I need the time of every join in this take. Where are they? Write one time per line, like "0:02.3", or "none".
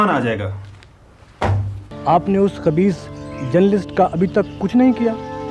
0:01.8